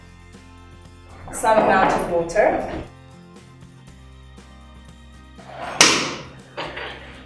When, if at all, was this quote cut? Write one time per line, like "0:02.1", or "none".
0:02.9
0:05.4